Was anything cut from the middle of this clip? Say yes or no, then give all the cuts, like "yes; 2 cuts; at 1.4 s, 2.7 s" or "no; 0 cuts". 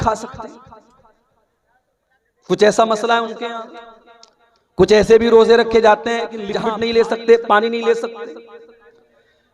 yes; 1 cut; at 6.5 s